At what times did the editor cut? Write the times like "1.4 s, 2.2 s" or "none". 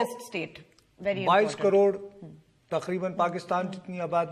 1.2 s